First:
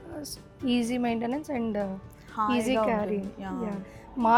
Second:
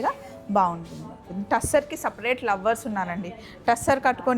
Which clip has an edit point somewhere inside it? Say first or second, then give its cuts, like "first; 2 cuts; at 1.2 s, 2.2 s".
second; 1 cut; at 1.3 s